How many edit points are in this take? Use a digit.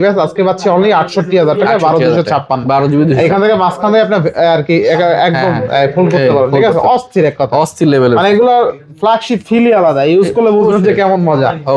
0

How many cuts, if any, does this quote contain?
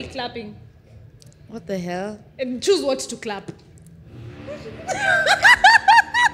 0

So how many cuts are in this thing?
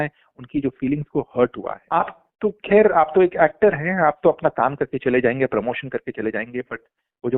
1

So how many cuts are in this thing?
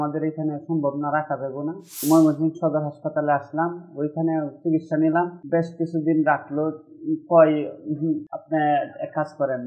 3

